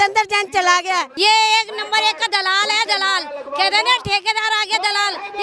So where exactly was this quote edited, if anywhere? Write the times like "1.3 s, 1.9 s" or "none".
1.1 s